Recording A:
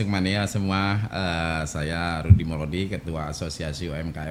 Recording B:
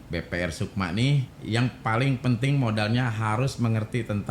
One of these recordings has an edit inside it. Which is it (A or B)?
B